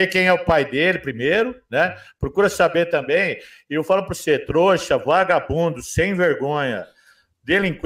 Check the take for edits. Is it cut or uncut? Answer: uncut